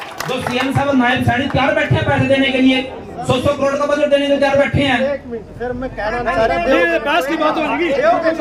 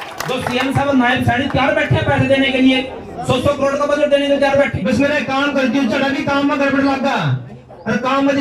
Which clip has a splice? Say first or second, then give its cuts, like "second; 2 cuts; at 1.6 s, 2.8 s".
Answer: second; 1 cut; at 4.7 s